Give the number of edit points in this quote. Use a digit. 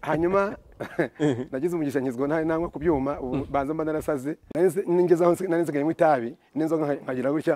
1